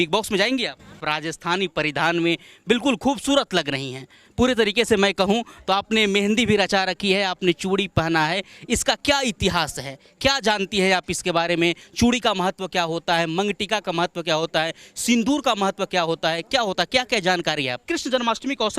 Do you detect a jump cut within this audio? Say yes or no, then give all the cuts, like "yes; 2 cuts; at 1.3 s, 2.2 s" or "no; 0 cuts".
yes; 2 cuts; at 1.0 s, 17.8 s